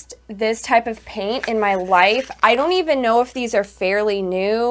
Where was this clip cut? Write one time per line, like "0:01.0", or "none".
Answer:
none